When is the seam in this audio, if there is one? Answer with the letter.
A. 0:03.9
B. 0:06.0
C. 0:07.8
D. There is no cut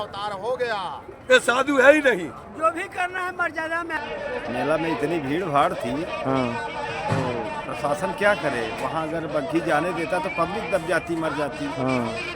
A